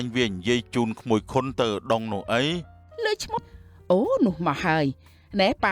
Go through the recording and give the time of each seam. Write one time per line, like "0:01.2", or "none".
0:03.4